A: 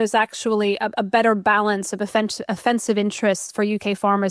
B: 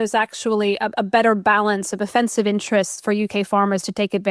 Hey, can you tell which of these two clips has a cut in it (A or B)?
B